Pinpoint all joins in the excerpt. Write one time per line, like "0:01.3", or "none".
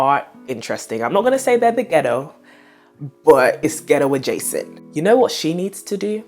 0:04.7

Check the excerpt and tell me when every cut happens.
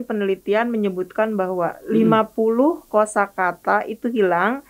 none

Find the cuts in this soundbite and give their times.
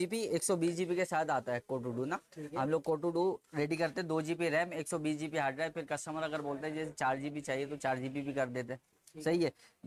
none

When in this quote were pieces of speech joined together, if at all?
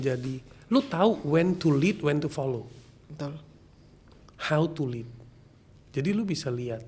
none

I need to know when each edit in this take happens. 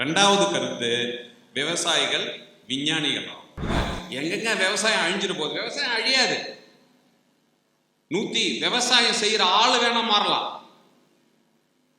0:03.7

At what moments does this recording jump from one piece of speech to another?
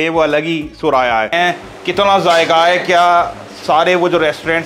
0:01.3

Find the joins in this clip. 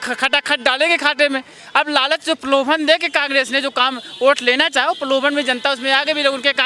none

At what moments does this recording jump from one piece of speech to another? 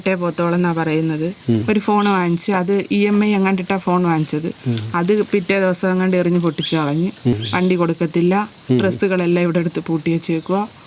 0:01.6
0:07.3

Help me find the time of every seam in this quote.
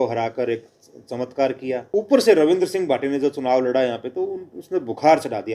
0:01.8

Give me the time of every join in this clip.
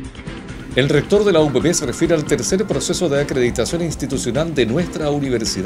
none

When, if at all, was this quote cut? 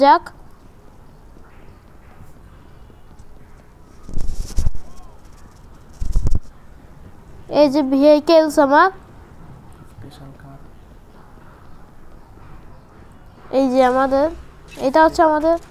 none

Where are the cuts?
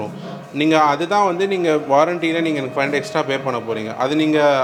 none

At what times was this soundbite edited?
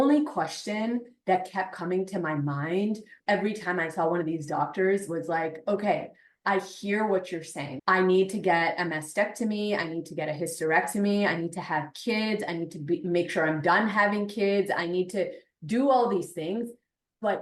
0:03.1
0:07.6

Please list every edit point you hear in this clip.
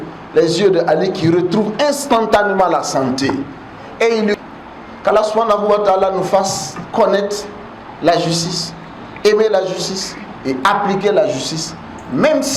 0:04.3

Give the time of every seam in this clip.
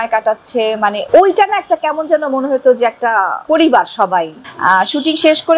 0:01.0
0:03.4
0:04.4

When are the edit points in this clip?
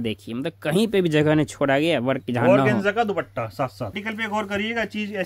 0:04.0

